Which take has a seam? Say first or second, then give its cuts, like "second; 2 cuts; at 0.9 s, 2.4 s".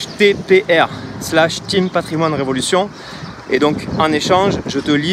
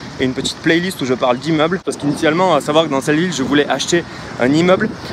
second; 1 cut; at 1.9 s